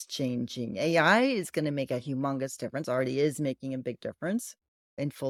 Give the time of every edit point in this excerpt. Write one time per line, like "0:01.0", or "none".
none